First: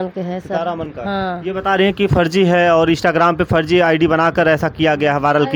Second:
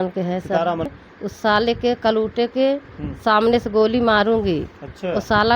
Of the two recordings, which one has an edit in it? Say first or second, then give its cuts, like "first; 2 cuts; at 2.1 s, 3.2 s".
second; 1 cut; at 1.0 s